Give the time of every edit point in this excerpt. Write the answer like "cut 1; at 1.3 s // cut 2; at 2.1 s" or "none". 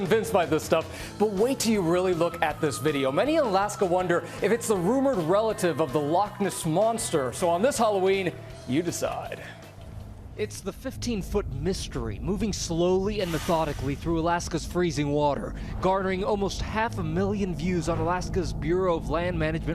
cut 1; at 16.0 s

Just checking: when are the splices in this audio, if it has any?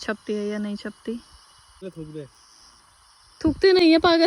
cut 1; at 2.0 s

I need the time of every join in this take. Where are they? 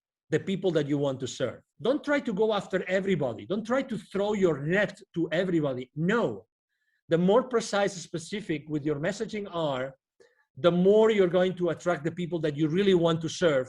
cut 1; at 1.7 s

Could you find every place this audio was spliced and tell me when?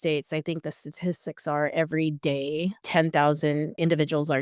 none

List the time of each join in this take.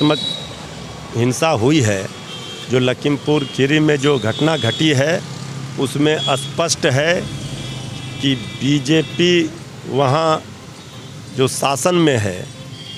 none

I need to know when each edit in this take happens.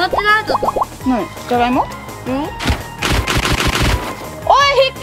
cut 1; at 0.9 s

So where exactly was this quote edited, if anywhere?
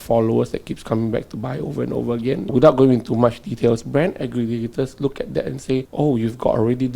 cut 1; at 2.5 s // cut 2; at 5.9 s

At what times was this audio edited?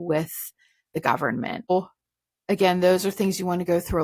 cut 1; at 1.7 s

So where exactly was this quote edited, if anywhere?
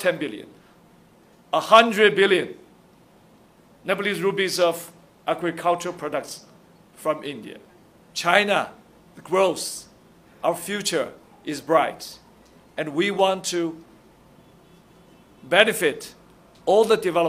cut 1; at 8.0 s

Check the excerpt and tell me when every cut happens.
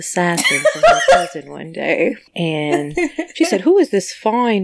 cut 1; at 2.3 s

